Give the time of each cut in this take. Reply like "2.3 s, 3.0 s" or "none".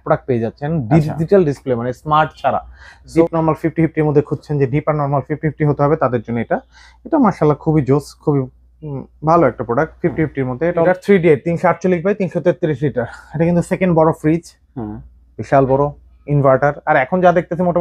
3.1 s, 10.9 s